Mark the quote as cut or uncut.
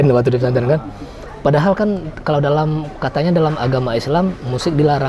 uncut